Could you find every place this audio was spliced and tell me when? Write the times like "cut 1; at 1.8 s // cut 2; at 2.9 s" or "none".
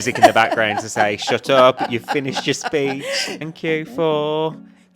cut 1; at 3.4 s